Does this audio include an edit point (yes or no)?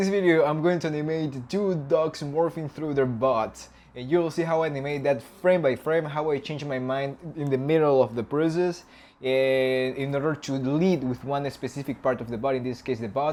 no